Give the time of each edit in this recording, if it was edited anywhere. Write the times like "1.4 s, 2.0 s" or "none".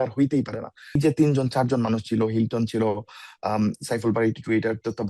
1.0 s